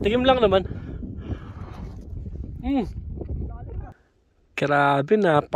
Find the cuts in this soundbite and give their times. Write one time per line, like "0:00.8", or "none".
0:03.9